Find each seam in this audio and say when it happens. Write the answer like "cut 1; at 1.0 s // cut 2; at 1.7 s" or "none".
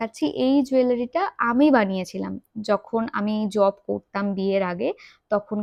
none

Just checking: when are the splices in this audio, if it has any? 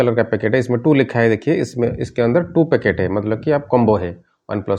none

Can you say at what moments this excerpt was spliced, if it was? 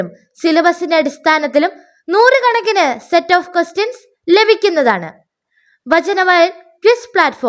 cut 1; at 3.5 s

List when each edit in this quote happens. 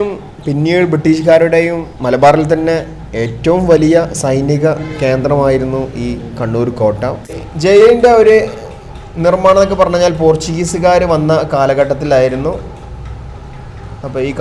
cut 1; at 7.4 s

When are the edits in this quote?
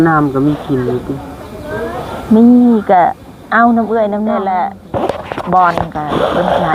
cut 1; at 4.4 s

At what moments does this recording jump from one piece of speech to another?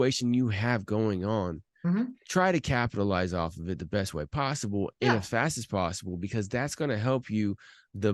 none

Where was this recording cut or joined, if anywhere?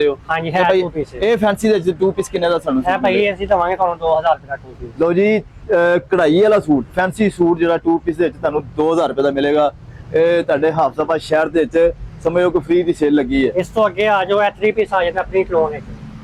none

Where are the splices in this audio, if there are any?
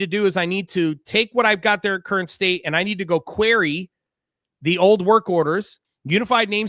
cut 1; at 5.8 s

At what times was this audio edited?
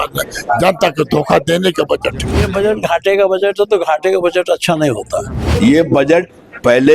cut 1; at 2.4 s // cut 2; at 5.4 s

